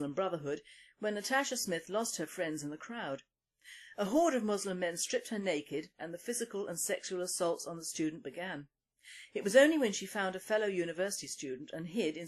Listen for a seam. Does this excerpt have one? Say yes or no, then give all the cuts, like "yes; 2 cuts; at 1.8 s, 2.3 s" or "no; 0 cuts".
no; 0 cuts